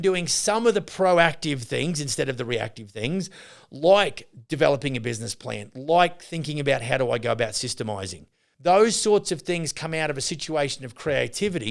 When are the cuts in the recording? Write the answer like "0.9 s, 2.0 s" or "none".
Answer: 8.4 s